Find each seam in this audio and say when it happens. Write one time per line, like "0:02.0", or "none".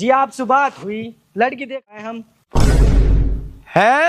0:02.0